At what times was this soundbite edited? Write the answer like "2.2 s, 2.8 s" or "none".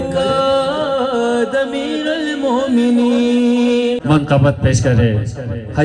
4.0 s